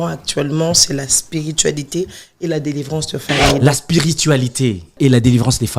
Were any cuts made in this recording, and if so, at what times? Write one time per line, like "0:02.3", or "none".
0:03.6
0:05.0